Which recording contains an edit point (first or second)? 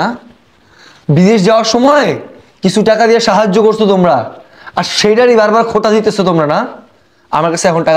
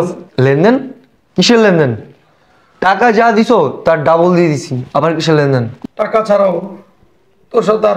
second